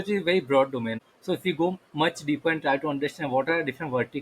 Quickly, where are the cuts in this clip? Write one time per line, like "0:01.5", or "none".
0:00.9